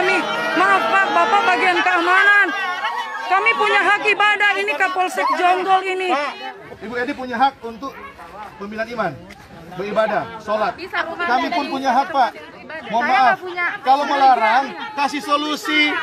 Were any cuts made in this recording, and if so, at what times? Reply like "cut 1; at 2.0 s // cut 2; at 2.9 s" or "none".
cut 1; at 6.6 s